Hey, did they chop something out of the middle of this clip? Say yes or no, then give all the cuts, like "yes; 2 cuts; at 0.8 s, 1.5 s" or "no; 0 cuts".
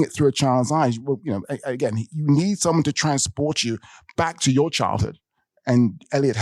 no; 0 cuts